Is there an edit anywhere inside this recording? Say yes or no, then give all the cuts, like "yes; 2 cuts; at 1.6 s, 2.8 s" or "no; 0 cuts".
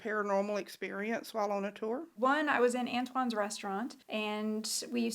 yes; 2 cuts; at 2.1 s, 4.0 s